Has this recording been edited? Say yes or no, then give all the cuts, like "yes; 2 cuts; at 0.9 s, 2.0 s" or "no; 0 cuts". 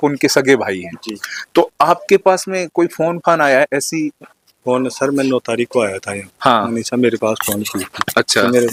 no; 0 cuts